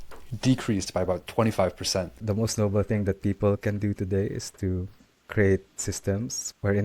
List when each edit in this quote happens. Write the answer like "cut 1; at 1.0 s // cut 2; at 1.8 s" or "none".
cut 1; at 2.2 s

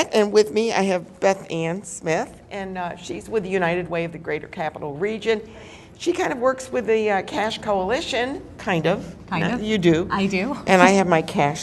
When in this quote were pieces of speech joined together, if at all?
cut 1; at 7.1 s

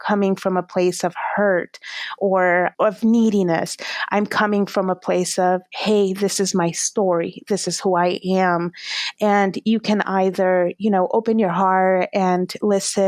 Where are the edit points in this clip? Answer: cut 1; at 2.7 s

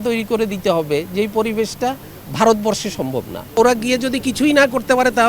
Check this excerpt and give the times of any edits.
cut 1; at 3.6 s

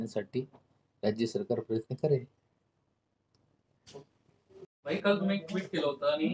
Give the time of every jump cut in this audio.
cut 1; at 4.7 s

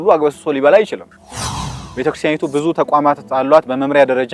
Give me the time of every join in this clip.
cut 1; at 1.7 s

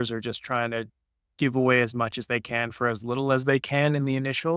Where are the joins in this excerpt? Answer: none

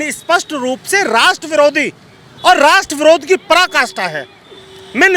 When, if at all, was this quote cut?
none

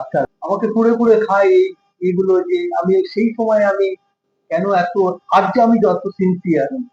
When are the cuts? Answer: none

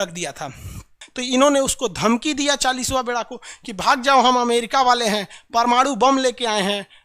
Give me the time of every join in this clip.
cut 1; at 1.0 s

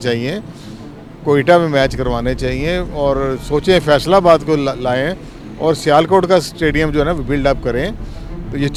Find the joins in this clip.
none

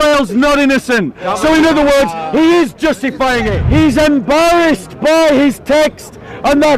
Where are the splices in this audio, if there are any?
cut 1; at 3.5 s

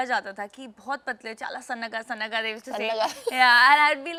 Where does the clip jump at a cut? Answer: none

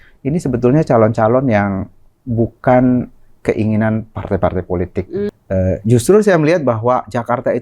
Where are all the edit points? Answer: cut 1; at 5.3 s

